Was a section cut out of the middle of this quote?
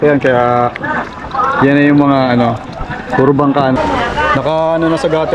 yes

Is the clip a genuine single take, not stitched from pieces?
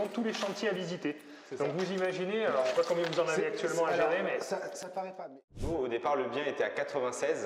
no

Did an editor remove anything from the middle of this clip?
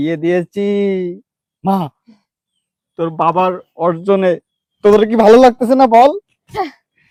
no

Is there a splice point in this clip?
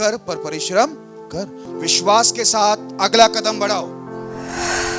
yes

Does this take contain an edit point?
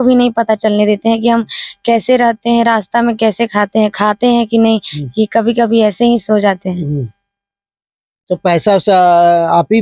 no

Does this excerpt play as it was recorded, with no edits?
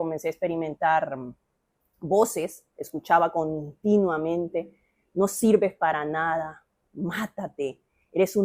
yes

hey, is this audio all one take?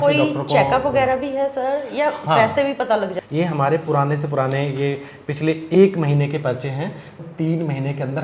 no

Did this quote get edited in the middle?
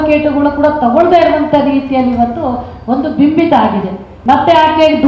yes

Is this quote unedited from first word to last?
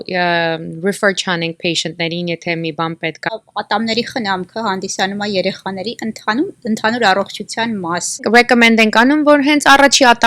no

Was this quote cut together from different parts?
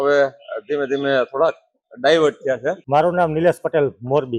yes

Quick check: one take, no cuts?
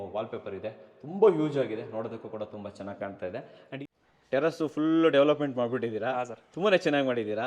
no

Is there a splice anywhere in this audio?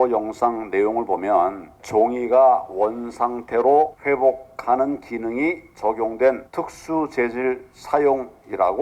yes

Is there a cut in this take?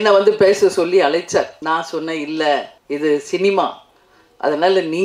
yes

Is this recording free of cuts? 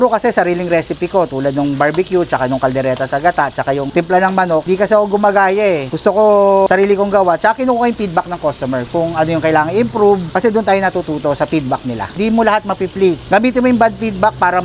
yes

